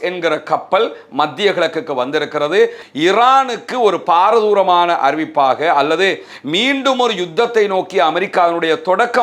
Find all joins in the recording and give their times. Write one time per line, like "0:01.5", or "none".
0:02.8